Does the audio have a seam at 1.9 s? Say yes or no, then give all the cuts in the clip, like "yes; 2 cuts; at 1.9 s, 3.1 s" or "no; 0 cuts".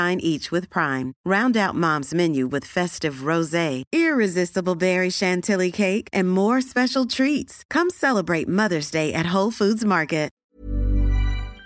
no; 1 cut; at 10.4 s